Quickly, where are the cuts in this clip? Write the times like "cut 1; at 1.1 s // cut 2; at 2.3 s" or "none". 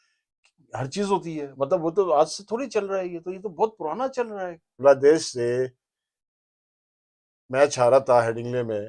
cut 1; at 4.7 s